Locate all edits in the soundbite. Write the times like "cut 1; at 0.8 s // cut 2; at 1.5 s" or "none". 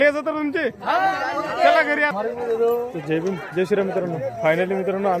cut 1; at 2.1 s